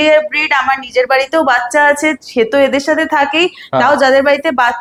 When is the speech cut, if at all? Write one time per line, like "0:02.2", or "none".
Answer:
none